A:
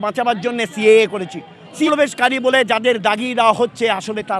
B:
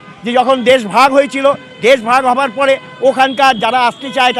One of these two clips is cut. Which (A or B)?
A